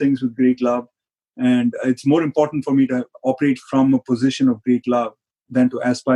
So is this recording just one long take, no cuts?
yes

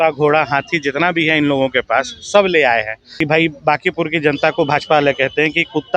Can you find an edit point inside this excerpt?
yes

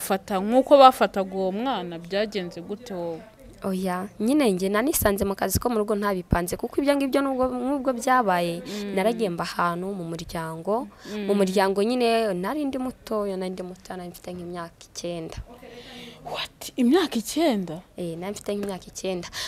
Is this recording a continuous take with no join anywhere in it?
yes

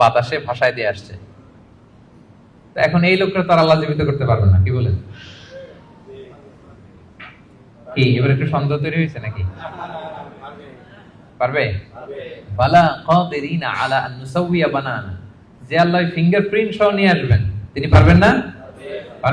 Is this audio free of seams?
yes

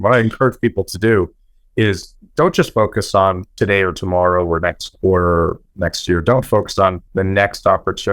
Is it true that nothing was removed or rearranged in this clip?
no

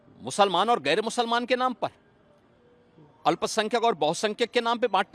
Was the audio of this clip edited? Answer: no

